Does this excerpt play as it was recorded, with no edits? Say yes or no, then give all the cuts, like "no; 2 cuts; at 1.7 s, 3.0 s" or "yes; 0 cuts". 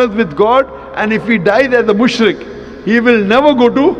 yes; 0 cuts